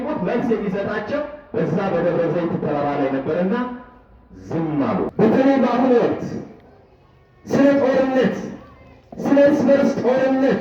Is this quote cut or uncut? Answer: cut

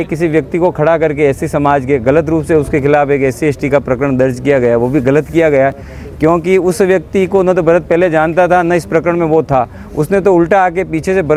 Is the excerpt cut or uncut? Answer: uncut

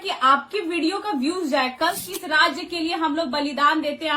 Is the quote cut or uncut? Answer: cut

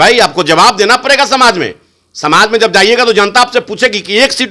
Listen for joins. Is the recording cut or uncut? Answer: uncut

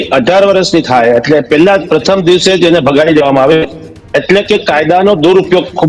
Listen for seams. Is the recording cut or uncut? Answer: uncut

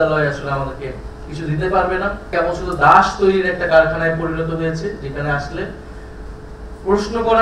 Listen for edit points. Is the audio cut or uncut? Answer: cut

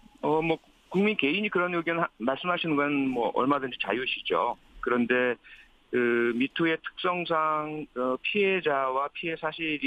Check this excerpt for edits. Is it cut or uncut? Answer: uncut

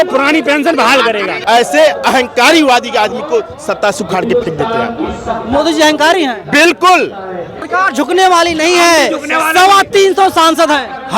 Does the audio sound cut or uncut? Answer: cut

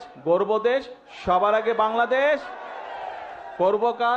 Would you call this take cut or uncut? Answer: uncut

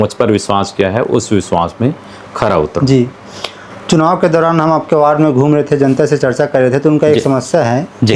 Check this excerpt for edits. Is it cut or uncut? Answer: uncut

